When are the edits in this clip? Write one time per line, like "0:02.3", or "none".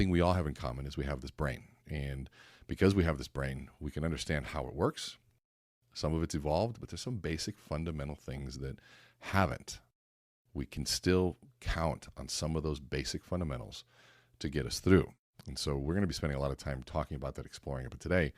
none